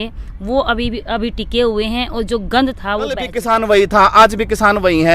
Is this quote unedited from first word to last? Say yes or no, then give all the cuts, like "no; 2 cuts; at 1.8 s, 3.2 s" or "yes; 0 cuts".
no; 1 cut; at 3.3 s